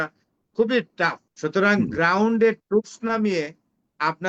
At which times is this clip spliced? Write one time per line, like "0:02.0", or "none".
0:01.3

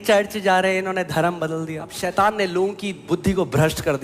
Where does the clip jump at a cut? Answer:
0:02.0

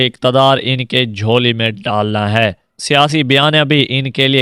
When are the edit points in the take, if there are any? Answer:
0:02.6

